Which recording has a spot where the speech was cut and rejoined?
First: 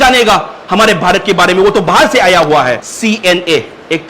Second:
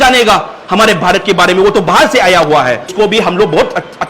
first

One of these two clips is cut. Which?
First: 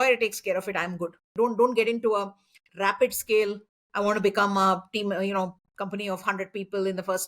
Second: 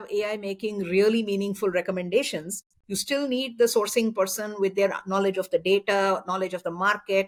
first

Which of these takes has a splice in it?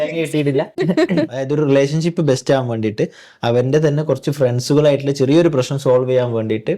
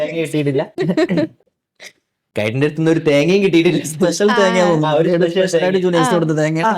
first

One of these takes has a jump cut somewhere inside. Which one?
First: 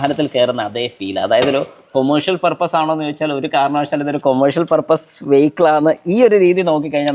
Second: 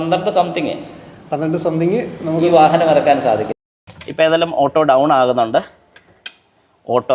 second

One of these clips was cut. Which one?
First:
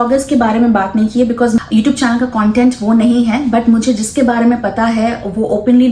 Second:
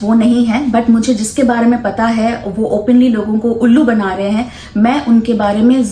first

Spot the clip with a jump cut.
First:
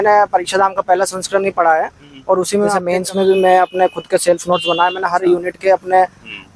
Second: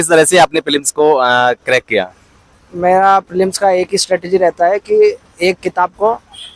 first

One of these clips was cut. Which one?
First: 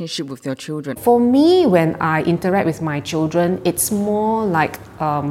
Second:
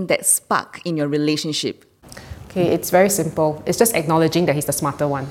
first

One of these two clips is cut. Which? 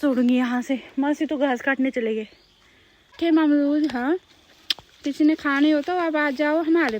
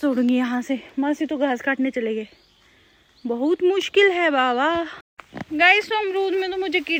first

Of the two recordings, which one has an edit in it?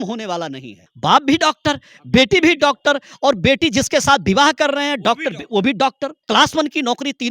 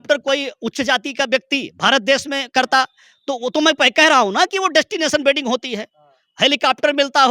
first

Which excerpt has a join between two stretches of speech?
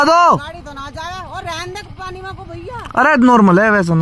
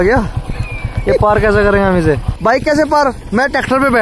second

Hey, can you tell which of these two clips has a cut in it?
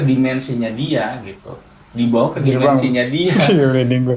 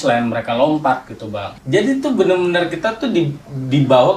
second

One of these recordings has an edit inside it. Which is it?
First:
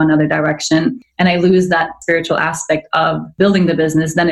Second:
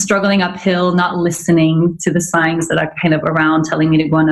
first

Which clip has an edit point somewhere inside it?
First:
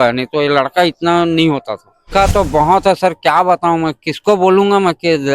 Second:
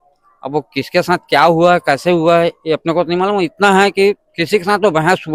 first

